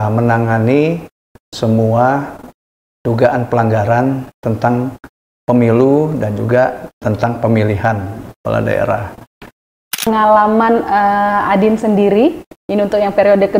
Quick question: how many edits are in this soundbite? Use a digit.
1